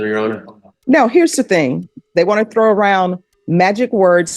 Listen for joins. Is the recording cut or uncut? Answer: cut